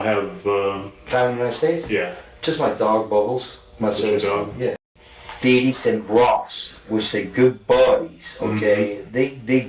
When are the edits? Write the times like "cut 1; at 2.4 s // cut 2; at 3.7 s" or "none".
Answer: cut 1; at 4.8 s